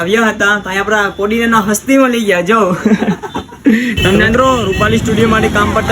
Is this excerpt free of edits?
no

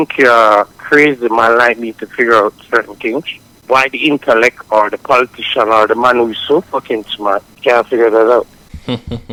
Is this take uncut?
yes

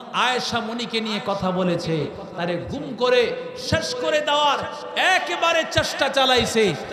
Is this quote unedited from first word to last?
yes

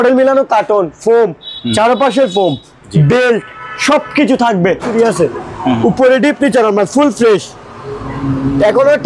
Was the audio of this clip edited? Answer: yes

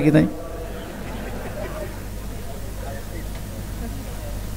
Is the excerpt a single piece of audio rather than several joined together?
yes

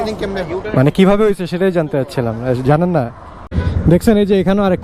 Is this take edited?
yes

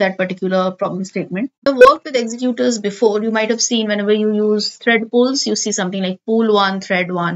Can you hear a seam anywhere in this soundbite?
yes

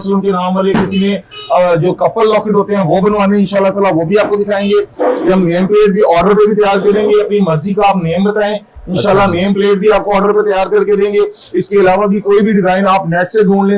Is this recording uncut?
no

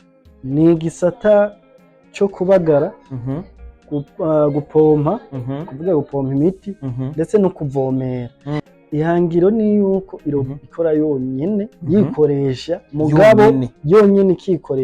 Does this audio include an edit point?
yes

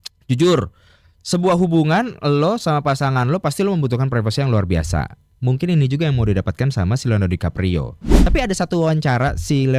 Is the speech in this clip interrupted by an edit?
yes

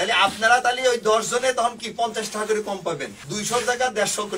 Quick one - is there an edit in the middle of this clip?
yes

